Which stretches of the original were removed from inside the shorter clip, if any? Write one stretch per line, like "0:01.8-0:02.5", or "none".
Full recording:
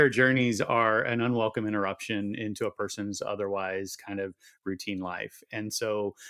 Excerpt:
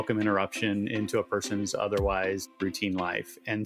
0:04.0-0:04.5